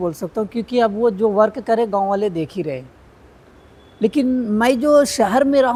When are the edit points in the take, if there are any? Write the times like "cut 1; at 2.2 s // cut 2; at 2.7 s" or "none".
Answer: none